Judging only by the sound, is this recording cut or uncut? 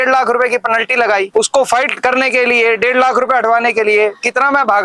cut